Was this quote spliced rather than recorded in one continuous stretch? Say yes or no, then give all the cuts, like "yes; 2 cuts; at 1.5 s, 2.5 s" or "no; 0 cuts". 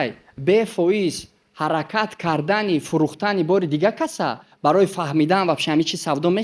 no; 0 cuts